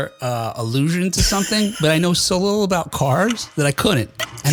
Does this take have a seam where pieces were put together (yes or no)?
no